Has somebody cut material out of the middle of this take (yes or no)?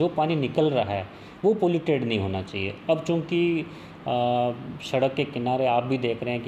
no